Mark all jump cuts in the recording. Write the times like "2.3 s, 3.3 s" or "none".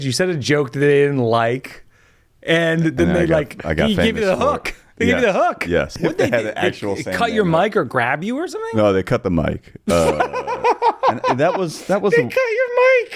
5.9 s